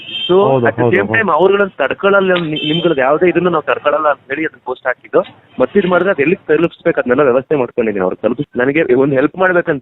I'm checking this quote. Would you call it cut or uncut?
cut